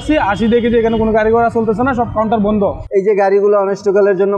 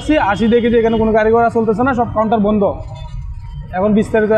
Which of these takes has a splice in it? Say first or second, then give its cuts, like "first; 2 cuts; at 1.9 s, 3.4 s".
first; 1 cut; at 2.8 s